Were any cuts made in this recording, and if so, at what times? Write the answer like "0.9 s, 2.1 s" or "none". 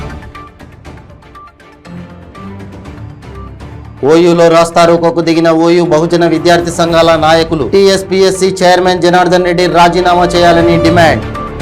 2.0 s

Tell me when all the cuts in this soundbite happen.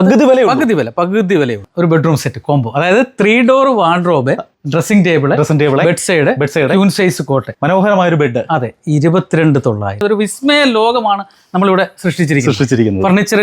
1.6 s, 9.9 s

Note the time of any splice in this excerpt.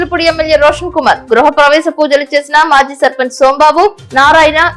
none

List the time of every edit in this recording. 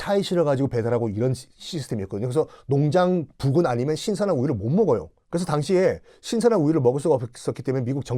5.2 s

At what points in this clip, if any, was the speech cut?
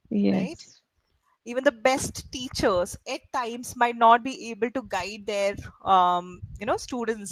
none

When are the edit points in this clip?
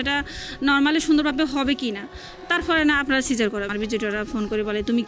3.7 s

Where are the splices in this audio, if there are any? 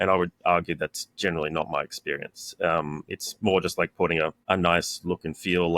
4.4 s

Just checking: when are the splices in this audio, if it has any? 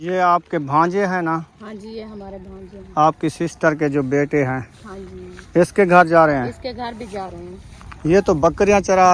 none

